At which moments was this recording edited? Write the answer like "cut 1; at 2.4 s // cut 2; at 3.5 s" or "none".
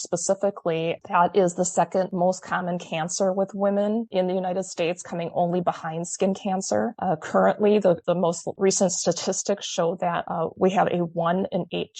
none